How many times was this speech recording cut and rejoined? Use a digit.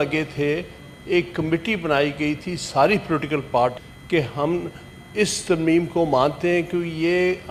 0